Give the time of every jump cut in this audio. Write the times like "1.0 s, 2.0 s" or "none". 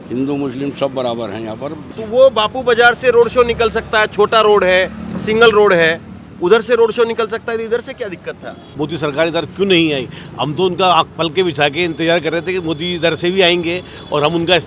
1.8 s, 8.6 s